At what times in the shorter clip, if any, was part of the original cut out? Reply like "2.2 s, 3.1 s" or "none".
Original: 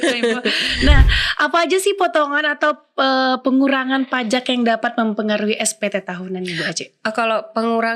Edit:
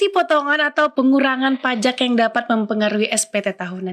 0.9 s